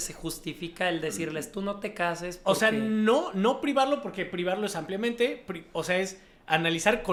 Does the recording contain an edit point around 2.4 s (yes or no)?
no